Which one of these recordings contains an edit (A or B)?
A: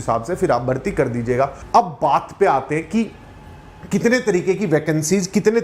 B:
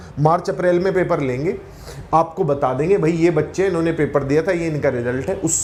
A